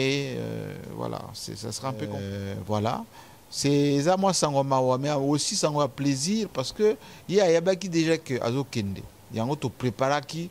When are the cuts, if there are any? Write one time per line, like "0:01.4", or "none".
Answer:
0:02.2